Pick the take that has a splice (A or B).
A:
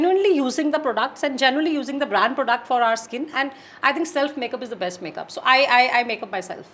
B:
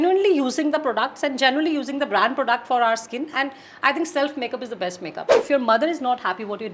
B